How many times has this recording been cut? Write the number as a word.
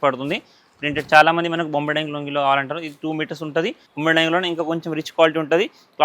one